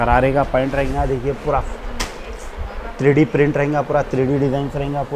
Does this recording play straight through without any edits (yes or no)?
yes